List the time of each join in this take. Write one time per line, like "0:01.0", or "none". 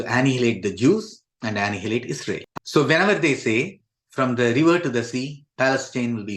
0:02.5